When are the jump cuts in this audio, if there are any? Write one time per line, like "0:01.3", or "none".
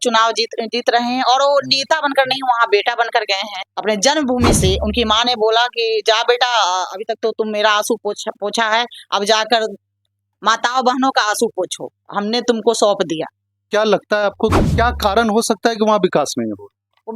0:03.6
0:13.6